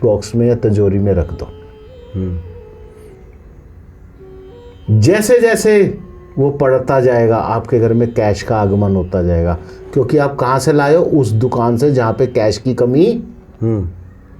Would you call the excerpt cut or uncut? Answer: uncut